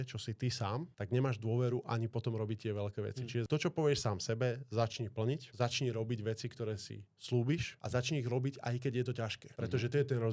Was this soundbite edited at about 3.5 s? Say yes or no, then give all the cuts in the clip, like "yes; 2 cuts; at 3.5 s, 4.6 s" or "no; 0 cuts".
yes; 1 cut; at 3.5 s